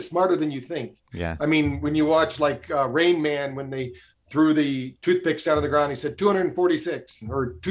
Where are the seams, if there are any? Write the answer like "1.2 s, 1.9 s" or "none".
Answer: none